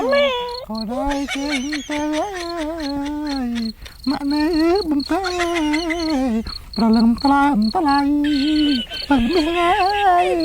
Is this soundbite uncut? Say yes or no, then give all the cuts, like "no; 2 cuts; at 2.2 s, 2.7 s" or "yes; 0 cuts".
yes; 0 cuts